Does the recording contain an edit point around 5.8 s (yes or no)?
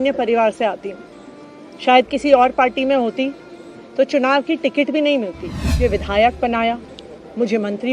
yes